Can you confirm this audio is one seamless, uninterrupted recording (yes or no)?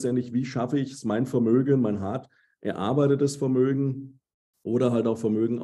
yes